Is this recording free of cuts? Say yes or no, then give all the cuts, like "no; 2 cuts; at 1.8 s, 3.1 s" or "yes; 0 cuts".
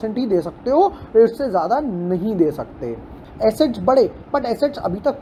no; 1 cut; at 3.2 s